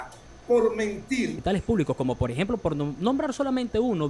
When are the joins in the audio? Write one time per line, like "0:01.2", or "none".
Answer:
0:01.4